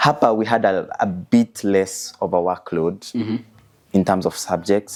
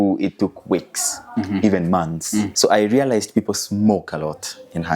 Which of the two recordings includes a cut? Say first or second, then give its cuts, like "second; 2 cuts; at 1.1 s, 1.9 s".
second; 1 cut; at 2.5 s